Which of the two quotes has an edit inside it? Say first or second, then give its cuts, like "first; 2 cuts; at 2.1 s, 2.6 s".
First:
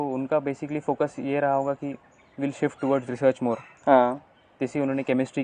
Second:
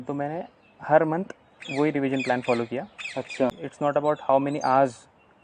second; 1 cut; at 3.6 s